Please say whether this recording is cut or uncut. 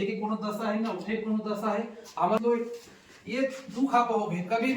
cut